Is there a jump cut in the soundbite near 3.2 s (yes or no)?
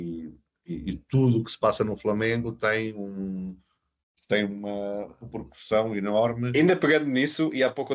no